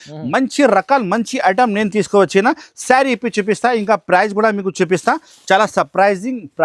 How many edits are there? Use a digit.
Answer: 0